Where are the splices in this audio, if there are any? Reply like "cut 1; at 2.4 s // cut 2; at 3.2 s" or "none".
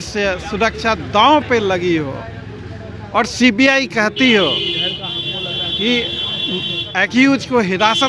none

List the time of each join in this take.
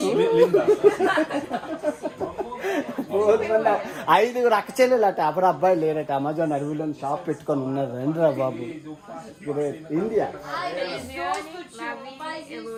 none

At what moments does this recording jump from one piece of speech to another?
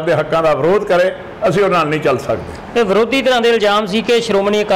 none

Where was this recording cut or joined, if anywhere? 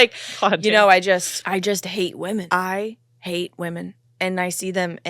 cut 1; at 1.4 s // cut 2; at 2.5 s

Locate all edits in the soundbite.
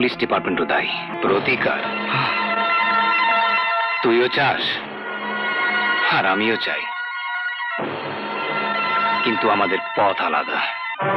cut 1; at 1.1 s

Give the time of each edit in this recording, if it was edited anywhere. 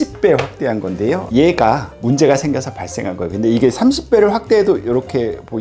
cut 1; at 1.2 s

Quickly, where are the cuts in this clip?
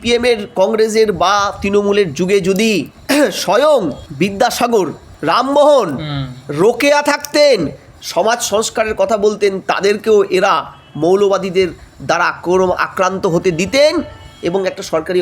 cut 1; at 2.9 s // cut 2; at 4.0 s // cut 3; at 5.1 s

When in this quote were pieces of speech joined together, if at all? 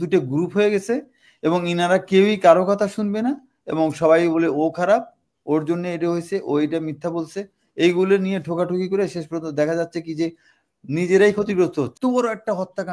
cut 1; at 11.9 s

